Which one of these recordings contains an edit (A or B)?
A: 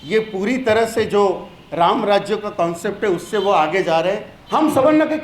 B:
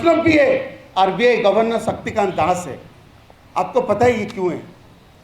A